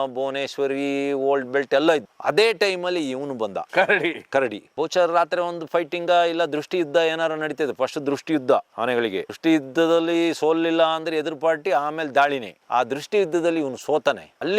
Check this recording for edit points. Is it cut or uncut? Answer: uncut